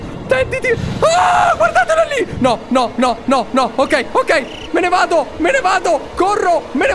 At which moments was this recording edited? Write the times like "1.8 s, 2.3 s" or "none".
none